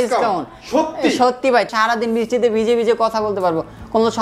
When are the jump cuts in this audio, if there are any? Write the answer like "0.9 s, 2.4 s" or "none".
1.7 s